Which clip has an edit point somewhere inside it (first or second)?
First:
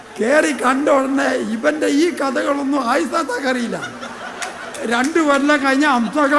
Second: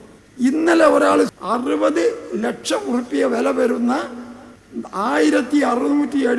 second